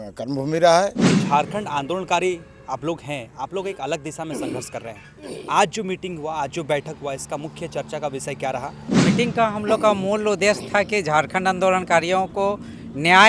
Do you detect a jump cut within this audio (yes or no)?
yes